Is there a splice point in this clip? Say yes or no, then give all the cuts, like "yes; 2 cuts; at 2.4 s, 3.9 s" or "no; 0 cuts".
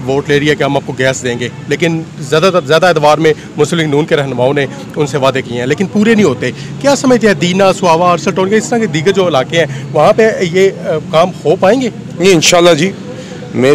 no; 0 cuts